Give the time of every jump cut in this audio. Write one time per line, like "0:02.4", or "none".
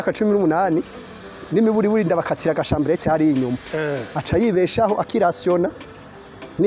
none

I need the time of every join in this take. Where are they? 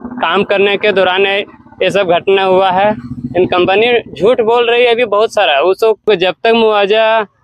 0:06.1

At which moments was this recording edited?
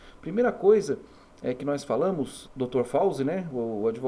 0:02.4

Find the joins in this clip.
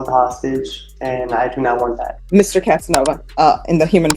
0:02.1
0:03.2

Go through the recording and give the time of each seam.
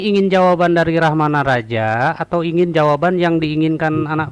none

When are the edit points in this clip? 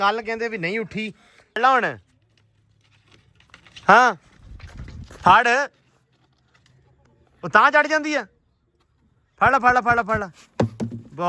0:01.6

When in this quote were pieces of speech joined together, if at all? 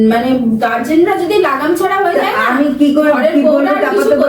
none

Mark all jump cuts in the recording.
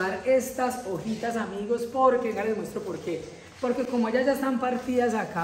none

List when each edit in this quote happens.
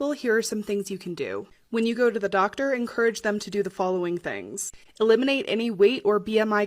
none

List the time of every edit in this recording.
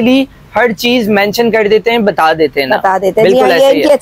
none

